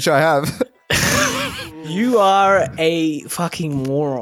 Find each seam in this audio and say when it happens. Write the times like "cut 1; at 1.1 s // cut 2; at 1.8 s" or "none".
cut 1; at 1.8 s